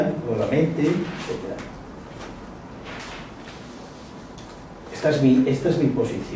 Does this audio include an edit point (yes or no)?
no